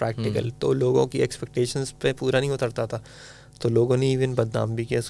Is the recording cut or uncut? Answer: uncut